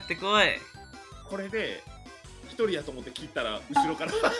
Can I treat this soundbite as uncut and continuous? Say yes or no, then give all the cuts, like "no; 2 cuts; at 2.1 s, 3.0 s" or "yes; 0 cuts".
no; 1 cut; at 1.1 s